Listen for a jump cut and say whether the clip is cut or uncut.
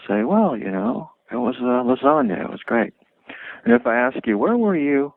uncut